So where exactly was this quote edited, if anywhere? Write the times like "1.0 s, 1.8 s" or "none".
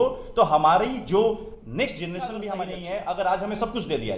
2.7 s